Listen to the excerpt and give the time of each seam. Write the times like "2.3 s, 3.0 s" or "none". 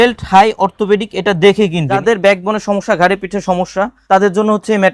2.0 s, 4.0 s